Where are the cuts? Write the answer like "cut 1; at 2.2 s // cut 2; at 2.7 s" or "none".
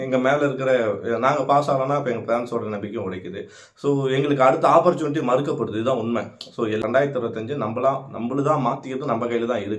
cut 1; at 6.7 s